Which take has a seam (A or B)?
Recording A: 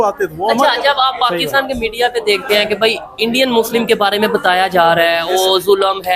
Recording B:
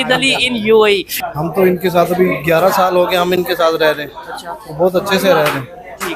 B